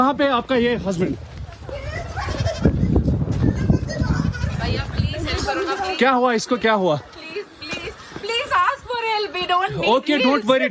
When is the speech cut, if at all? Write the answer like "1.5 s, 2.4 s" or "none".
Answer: none